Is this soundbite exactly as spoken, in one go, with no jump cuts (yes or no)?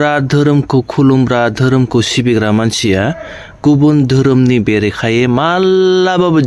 yes